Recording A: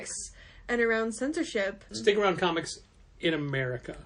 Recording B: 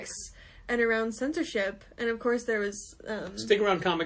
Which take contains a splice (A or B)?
A